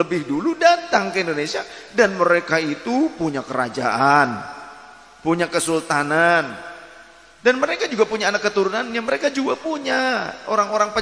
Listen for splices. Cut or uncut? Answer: uncut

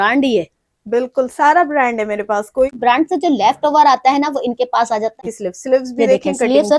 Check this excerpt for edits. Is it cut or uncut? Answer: cut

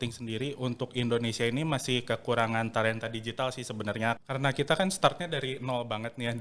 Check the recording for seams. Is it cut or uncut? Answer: cut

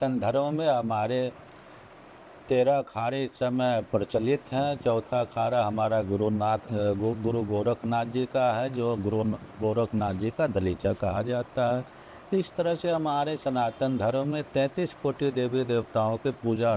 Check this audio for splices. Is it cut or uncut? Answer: uncut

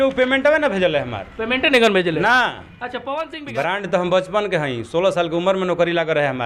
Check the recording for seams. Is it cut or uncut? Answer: cut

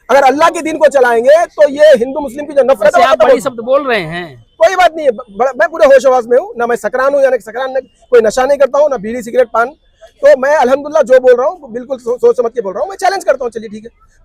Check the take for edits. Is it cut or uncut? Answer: uncut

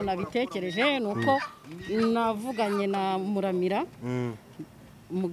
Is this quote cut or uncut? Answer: uncut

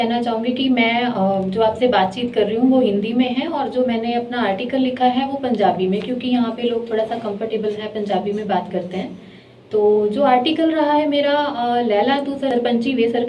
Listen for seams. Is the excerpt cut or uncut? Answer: uncut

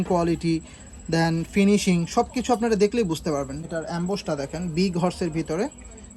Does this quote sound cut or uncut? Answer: cut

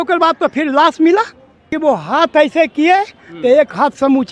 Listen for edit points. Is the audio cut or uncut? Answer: cut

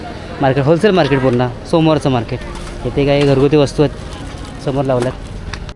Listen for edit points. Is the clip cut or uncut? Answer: uncut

